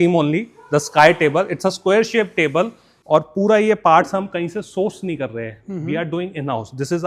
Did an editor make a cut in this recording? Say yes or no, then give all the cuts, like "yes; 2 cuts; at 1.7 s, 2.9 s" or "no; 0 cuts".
yes; 1 cut; at 2.9 s